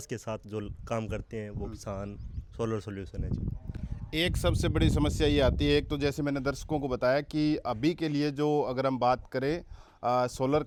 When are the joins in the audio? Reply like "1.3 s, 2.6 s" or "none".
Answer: none